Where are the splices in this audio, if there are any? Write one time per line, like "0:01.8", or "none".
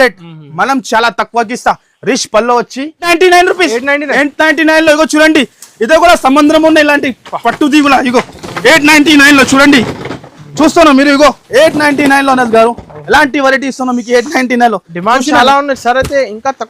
0:03.0